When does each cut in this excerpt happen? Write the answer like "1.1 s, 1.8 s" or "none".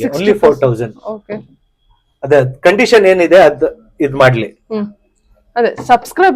none